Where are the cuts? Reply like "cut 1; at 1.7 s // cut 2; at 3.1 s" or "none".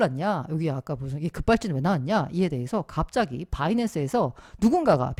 none